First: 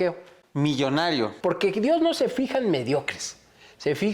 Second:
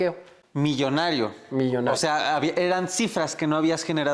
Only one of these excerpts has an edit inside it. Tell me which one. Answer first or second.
first